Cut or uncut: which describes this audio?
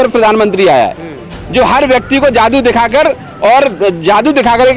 uncut